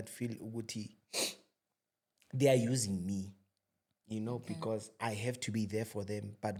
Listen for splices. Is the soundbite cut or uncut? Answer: uncut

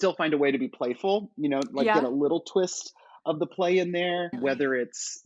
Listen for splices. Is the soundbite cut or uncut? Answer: uncut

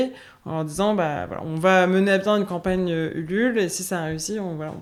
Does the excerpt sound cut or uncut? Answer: uncut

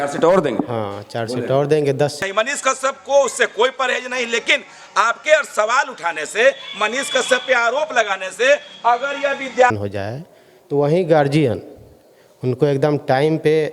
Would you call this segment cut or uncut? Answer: cut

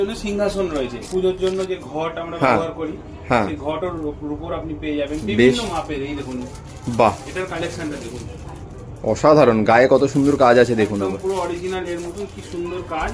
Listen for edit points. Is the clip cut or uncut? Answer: cut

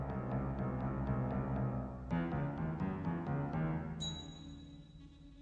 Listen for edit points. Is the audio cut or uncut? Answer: uncut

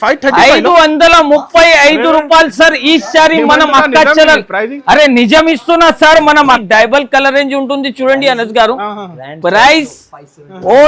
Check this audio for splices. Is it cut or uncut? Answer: cut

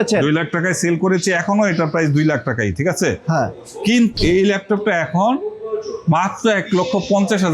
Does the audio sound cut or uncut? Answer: cut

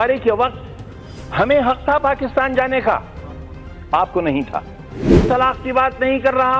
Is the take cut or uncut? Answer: cut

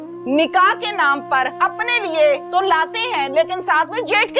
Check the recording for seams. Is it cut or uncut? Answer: cut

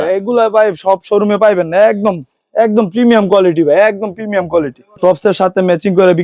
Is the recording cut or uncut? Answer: cut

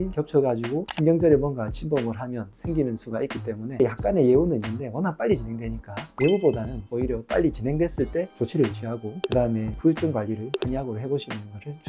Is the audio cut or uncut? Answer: uncut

